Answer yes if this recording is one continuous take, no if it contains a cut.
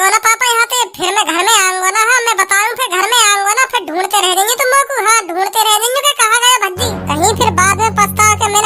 no